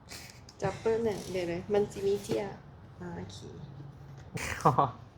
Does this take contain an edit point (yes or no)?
yes